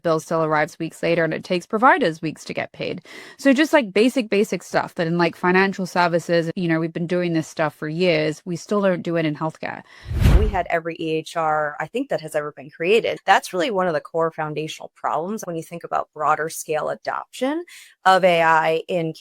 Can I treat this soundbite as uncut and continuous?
no; 4 cuts; at 6.5 s, 10.4 s, 13.1 s, 15.4 s

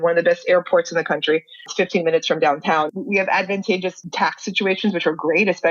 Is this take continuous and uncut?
no; 3 cuts; at 1.6 s, 2.9 s, 4.0 s

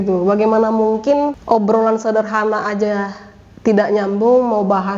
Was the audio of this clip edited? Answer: yes; 1 cut; at 1.4 s

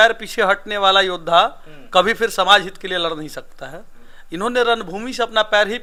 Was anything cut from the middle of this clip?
no; 0 cuts

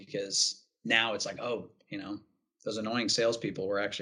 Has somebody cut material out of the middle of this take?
no; 0 cuts

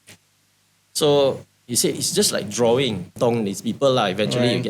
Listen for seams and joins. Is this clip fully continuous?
no; 1 cut; at 3.1 s

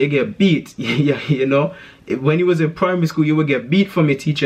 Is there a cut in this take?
no; 0 cuts

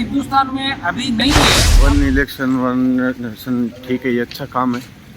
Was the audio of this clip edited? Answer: yes; 1 cut; at 1.7 s

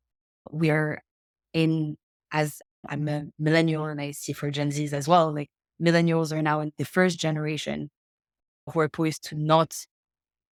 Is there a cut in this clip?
no; 0 cuts

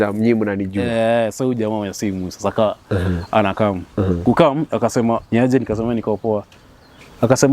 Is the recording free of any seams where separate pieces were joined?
no; 1 cut; at 5.2 s

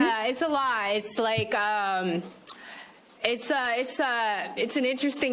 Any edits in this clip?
no; 0 cuts

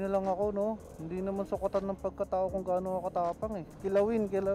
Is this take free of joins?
no; 2 cuts; at 0.9 s, 3.7 s

